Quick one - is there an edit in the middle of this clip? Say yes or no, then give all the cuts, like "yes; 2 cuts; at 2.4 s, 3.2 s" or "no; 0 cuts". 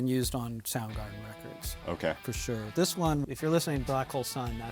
no; 0 cuts